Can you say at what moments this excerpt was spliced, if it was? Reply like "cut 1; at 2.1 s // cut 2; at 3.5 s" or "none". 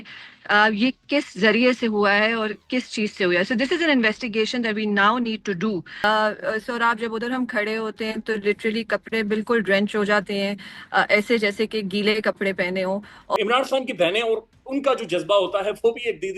cut 1; at 6.0 s // cut 2; at 13.4 s